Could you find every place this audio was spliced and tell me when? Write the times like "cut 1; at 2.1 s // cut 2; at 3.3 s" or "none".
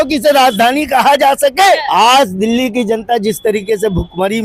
cut 1; at 1.8 s